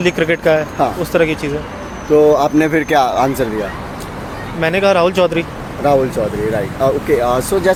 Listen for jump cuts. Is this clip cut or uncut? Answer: uncut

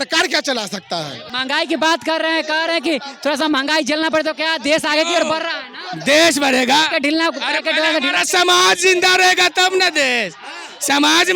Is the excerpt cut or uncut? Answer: cut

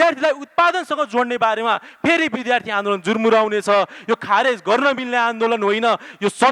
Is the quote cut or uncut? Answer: uncut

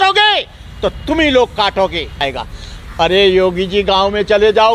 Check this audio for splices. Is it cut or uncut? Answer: cut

